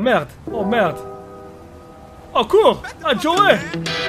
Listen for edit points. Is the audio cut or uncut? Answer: uncut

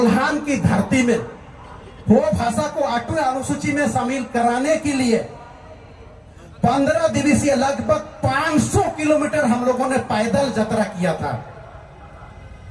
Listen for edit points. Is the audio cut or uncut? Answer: uncut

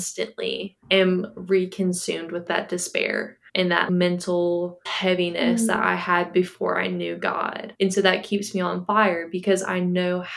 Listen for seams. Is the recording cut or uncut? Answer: cut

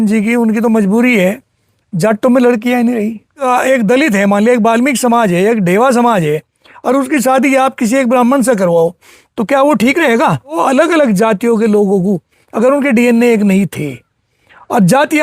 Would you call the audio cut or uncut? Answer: cut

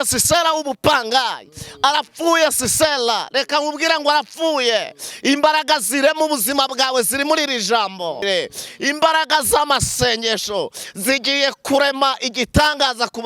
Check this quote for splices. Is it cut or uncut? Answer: cut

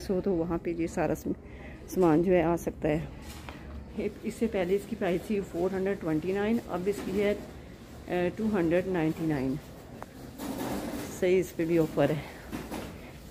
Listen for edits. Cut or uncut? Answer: cut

